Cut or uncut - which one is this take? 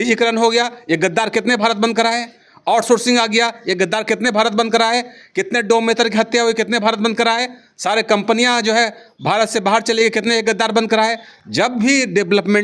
uncut